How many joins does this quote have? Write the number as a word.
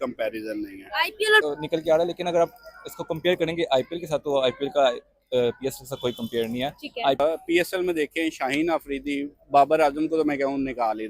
two